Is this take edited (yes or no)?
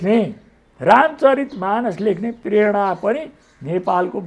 no